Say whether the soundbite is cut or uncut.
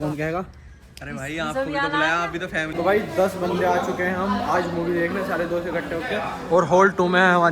cut